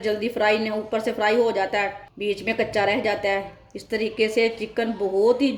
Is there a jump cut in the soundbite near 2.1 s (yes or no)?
yes